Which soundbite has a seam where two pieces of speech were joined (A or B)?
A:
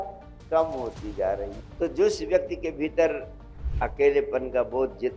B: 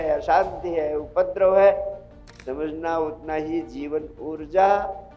A